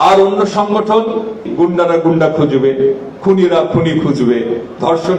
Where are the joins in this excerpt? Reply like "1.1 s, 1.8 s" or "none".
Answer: 1.5 s